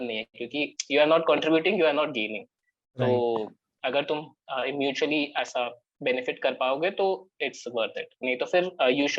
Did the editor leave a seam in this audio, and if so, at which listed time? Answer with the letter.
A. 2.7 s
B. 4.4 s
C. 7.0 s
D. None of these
D